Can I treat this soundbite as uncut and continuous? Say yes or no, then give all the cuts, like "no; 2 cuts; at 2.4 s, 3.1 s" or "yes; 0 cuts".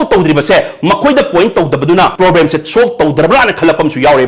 no; 1 cut; at 2.1 s